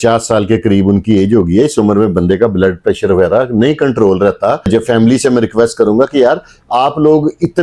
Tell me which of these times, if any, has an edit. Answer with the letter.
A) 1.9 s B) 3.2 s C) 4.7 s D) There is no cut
C